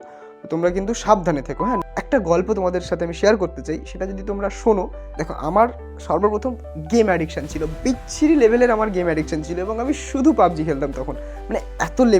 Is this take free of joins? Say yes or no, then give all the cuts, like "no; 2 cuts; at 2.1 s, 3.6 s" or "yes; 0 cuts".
no; 2 cuts; at 1.8 s, 5.0 s